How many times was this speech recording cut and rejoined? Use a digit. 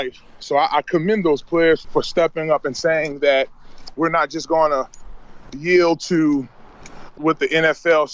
2